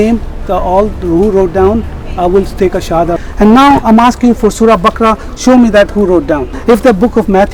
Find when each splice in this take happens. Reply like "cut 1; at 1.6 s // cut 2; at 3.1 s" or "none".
cut 1; at 3.2 s // cut 2; at 6.5 s